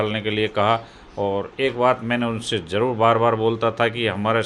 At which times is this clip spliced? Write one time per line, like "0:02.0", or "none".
none